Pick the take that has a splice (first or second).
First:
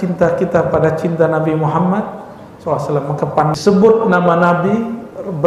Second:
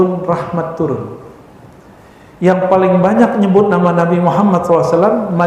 first